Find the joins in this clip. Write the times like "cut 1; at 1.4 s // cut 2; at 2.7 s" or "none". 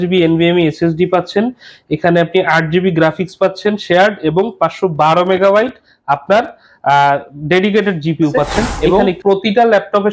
cut 1; at 8.8 s